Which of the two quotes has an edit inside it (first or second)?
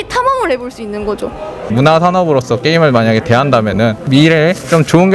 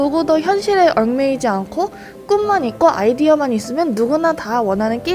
first